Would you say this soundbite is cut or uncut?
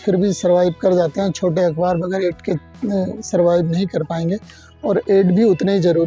uncut